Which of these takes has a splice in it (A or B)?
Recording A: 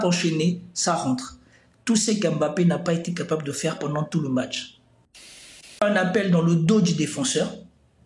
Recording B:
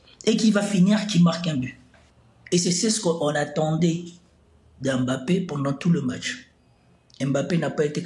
A